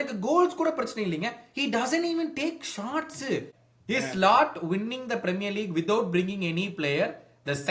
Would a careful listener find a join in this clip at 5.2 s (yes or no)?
no